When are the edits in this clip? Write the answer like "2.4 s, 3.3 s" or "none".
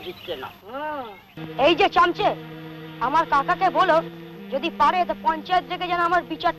1.4 s